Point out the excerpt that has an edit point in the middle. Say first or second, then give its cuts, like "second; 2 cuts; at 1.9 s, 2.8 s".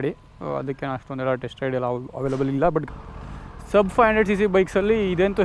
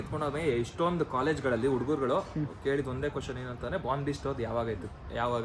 first; 1 cut; at 2.8 s